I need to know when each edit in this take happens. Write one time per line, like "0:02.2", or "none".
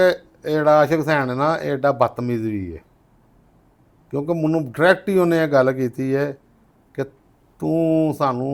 none